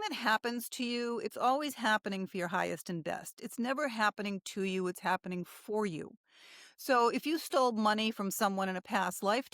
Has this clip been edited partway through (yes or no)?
no